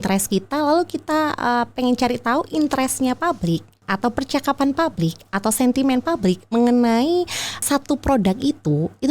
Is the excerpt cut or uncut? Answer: cut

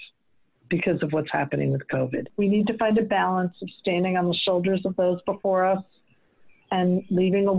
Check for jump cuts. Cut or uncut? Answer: cut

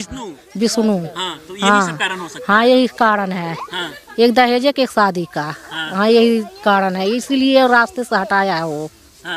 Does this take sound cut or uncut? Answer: uncut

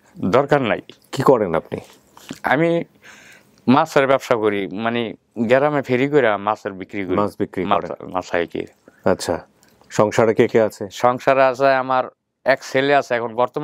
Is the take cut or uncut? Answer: uncut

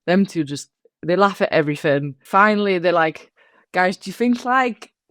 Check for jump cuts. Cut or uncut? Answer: cut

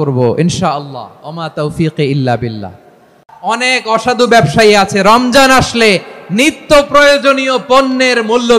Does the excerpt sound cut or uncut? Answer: cut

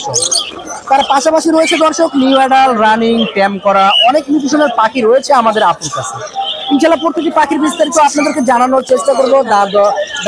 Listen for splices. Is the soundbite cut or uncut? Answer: uncut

